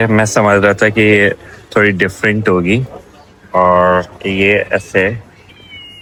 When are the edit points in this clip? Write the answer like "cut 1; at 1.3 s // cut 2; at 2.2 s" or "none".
none